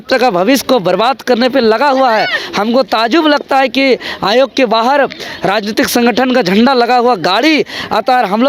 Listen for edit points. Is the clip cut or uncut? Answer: uncut